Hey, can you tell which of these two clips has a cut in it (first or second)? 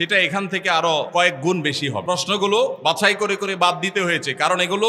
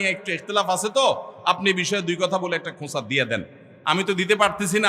first